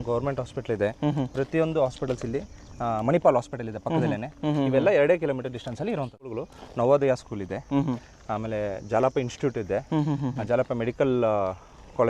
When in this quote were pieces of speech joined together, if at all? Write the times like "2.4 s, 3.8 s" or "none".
6.2 s